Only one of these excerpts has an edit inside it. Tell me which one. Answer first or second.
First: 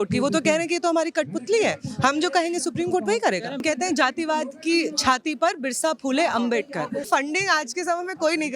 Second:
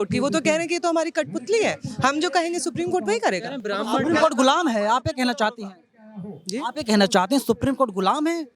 first